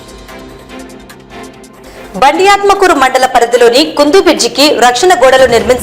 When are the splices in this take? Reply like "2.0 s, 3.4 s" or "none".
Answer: 1.7 s